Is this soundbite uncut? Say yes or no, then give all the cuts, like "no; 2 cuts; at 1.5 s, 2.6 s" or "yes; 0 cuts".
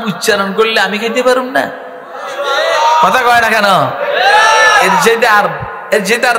yes; 0 cuts